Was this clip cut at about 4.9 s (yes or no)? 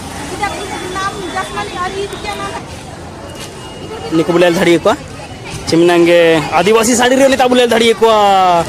no